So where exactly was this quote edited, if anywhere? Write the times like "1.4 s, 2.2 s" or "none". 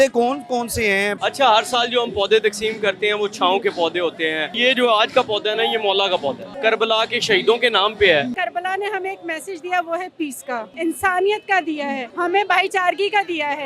1.1 s, 4.6 s, 6.5 s, 8.3 s, 10.7 s, 12.1 s